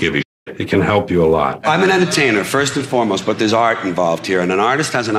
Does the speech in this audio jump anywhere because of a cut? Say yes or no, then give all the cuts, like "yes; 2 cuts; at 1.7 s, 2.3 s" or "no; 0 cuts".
yes; 1 cut; at 1.6 s